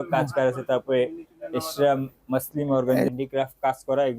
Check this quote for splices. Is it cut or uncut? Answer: cut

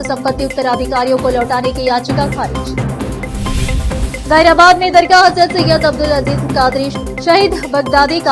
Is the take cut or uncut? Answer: uncut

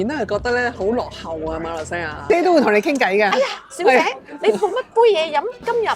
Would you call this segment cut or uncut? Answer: cut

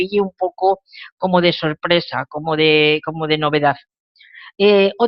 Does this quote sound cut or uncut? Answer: uncut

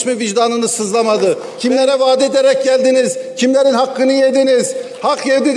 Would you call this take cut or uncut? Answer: cut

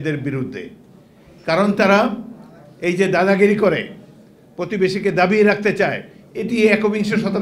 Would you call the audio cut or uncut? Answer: uncut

